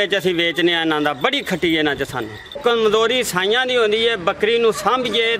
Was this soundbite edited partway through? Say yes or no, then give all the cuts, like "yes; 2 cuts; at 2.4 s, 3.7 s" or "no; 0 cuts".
yes; 1 cut; at 2.6 s